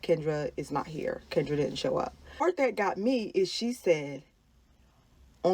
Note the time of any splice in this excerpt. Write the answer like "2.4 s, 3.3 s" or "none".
2.4 s